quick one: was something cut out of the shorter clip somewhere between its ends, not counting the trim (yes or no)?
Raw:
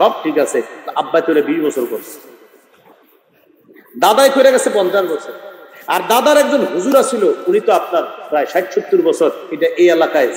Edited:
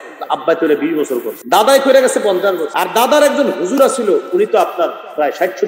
yes